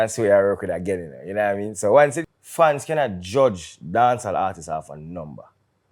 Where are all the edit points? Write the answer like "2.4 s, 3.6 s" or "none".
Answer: 2.2 s